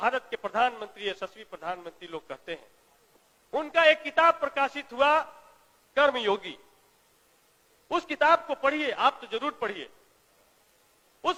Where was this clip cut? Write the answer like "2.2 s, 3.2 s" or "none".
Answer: none